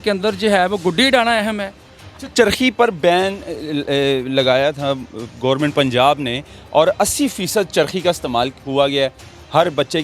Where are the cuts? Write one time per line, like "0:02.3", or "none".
0:02.1